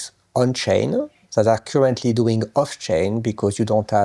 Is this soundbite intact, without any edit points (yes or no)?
yes